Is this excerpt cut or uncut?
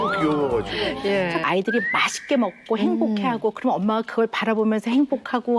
cut